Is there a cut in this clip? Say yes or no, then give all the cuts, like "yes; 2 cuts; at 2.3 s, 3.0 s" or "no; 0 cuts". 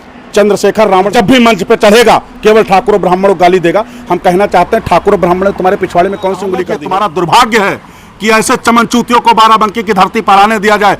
yes; 2 cuts; at 1.1 s, 6.7 s